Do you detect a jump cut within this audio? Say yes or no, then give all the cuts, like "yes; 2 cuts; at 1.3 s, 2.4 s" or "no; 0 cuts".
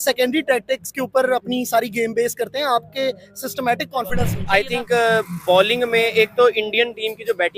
yes; 1 cut; at 4.4 s